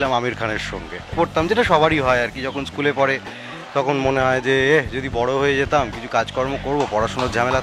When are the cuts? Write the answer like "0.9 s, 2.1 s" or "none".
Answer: 1.1 s